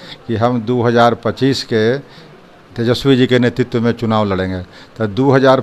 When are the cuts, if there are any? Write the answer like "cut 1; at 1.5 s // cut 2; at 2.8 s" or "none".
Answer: none